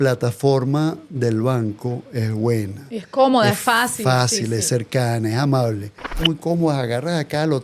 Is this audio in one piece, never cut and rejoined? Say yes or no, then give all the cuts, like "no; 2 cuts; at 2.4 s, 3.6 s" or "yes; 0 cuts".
no; 1 cut; at 6.0 s